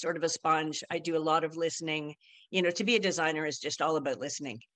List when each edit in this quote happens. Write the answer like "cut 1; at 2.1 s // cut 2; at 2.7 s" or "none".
none